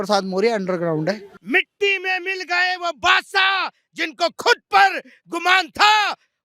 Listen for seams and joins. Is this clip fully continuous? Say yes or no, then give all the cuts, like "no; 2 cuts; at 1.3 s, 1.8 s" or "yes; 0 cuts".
no; 1 cut; at 1.3 s